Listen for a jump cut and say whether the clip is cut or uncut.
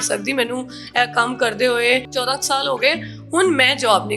cut